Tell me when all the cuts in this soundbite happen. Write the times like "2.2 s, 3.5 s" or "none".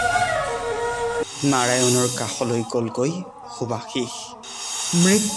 1.2 s